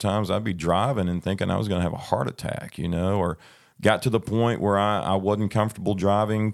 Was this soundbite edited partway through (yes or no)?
no